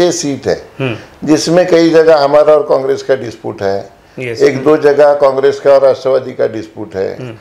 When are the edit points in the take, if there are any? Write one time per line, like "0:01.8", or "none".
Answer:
none